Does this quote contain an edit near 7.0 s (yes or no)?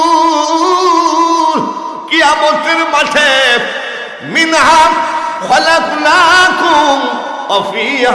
no